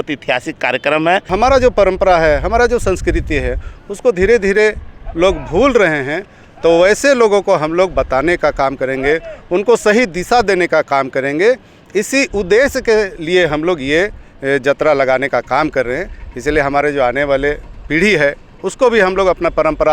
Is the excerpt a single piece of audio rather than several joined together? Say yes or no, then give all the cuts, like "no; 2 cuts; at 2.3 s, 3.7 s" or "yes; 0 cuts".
no; 1 cut; at 1.3 s